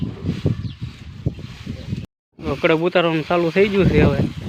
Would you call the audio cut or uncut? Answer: cut